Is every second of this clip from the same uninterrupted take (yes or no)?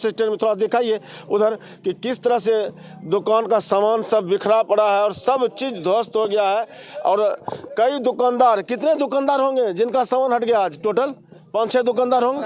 yes